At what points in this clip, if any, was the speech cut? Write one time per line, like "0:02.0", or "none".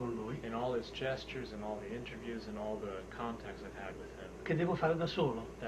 none